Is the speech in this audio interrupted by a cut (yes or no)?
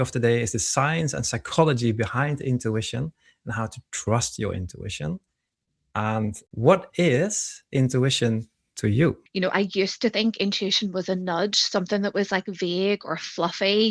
yes